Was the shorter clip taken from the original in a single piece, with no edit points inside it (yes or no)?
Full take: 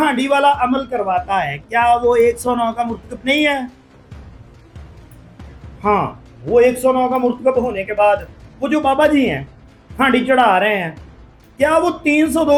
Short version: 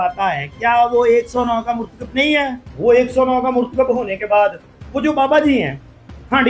no